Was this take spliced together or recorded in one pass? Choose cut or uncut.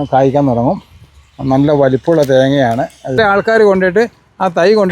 cut